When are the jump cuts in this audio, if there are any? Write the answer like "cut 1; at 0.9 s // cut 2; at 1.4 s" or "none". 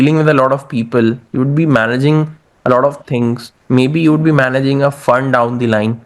none